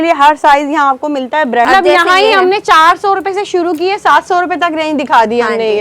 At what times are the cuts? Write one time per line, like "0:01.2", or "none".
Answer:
0:01.7